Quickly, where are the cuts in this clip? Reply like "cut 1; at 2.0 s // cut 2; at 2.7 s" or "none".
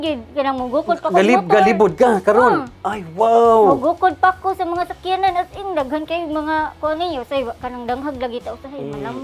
cut 1; at 7.6 s